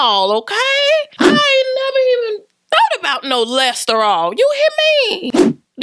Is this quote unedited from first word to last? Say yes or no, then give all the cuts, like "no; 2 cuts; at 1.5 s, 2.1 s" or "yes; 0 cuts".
yes; 0 cuts